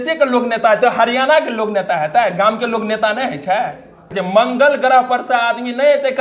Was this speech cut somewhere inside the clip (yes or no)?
yes